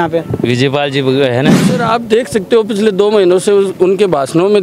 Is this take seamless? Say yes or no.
no